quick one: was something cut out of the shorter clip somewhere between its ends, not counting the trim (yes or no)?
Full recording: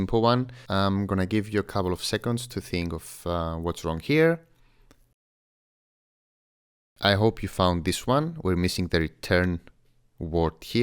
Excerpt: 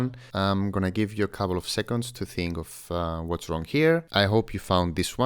yes